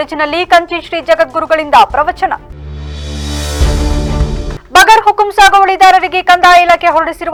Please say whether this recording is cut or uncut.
uncut